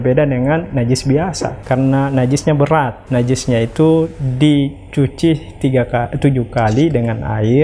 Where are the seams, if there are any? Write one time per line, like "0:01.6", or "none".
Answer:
0:01.5
0:03.0